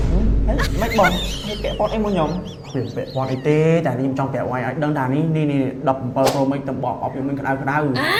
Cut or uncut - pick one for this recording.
uncut